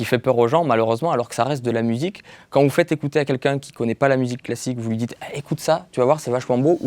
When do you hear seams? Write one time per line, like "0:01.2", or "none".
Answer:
0:02.3